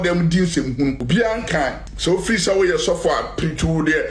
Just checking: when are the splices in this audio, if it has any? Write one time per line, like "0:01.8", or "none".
0:01.0
0:01.9